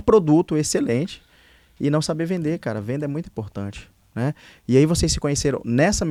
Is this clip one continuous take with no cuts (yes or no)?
yes